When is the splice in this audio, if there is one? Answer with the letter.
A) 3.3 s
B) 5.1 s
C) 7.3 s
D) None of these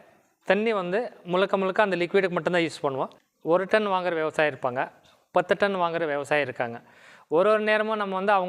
A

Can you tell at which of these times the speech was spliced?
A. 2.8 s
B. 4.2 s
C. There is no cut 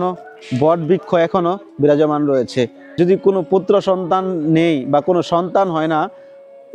A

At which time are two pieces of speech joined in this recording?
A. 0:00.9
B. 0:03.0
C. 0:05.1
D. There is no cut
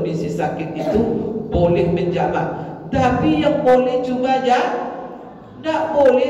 D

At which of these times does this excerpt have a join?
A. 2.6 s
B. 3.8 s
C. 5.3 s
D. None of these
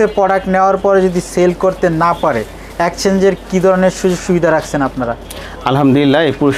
D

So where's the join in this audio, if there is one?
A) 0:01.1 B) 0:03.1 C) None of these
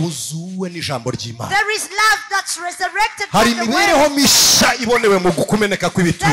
C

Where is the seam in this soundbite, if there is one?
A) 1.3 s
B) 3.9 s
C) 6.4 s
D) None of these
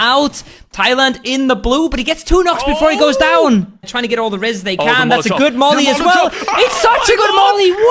B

